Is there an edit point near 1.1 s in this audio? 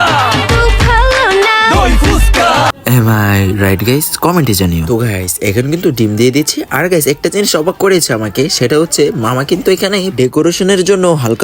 no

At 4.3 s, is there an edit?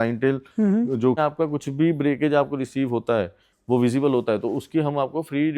no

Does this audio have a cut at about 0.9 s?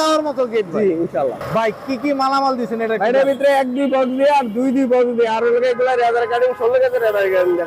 yes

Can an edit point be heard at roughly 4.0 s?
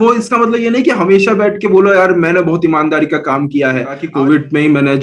yes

